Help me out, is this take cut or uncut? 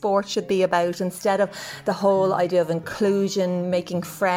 uncut